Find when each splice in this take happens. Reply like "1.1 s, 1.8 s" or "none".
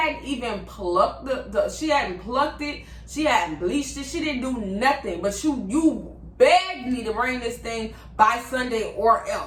none